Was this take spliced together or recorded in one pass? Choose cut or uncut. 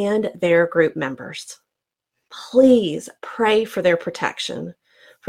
cut